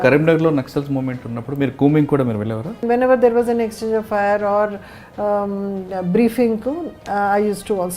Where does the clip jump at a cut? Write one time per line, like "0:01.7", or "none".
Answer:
0:02.8